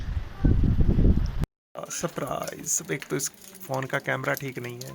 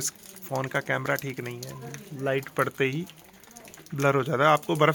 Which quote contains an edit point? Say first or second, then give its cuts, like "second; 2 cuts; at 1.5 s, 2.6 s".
first; 2 cuts; at 0.8 s, 1.5 s